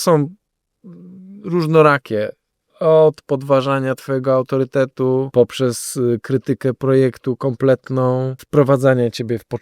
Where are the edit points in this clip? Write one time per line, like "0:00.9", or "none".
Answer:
0:05.3
0:08.4